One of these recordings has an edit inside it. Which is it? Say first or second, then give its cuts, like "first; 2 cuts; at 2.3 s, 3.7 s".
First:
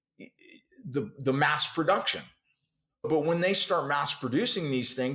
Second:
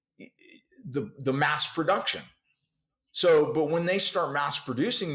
first; 1 cut; at 3.1 s